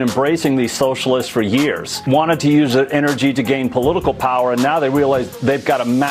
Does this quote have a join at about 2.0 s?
yes; 1 cut; at 2.0 s

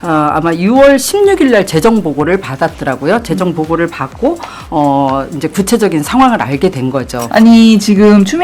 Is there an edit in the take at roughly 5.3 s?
no; 1 cut; at 7.2 s

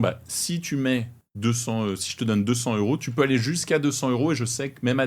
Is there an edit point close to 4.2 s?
no; 1 cut; at 1.2 s

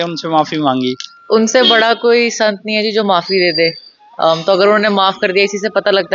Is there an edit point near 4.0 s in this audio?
no; 1 cut; at 1.1 s

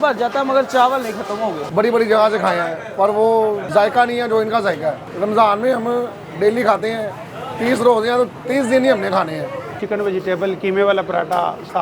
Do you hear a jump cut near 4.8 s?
no; 2 cuts; at 1.6 s, 9.8 s

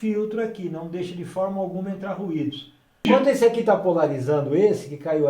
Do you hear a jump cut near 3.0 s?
yes; 1 cut; at 3.0 s

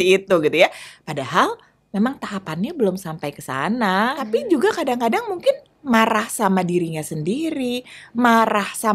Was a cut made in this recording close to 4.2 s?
yes; 1 cut; at 4.2 s

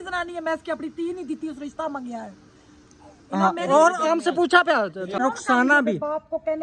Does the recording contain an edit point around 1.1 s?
no; 1 cut; at 5.2 s

